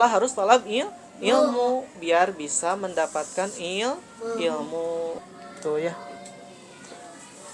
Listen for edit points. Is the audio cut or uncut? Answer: cut